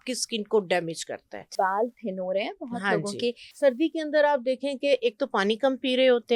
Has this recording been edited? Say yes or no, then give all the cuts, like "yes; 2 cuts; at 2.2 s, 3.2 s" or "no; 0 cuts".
yes; 2 cuts; at 1.5 s, 3.5 s